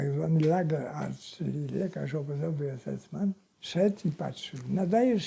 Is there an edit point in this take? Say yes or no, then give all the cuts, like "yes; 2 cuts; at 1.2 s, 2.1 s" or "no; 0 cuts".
yes; 1 cut; at 3.5 s